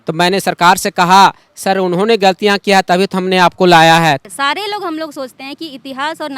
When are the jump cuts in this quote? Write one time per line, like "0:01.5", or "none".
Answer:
0:04.2

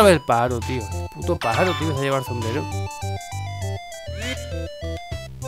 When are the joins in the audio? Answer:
none

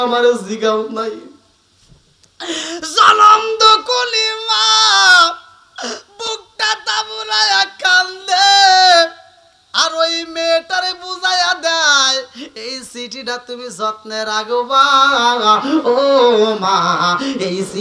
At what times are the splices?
none

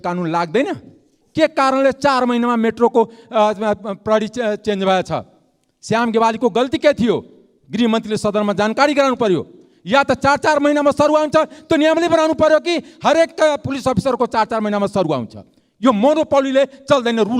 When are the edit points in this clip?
none

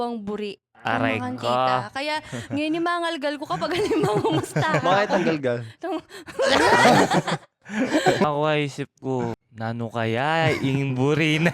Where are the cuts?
0:08.2
0:09.5

